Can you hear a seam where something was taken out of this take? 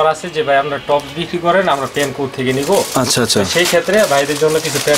no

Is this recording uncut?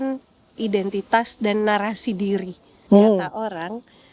no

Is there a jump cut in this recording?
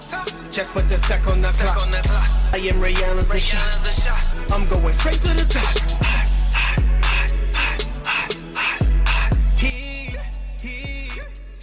no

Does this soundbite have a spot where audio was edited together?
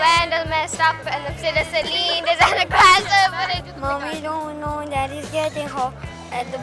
yes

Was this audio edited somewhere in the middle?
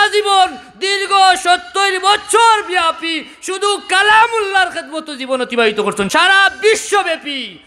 yes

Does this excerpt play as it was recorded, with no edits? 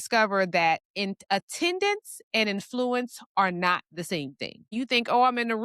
no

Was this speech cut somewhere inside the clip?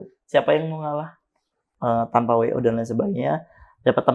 yes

